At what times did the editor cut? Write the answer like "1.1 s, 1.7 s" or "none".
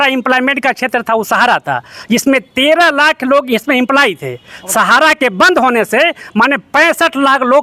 none